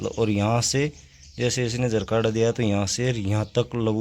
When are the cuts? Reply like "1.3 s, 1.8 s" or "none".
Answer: none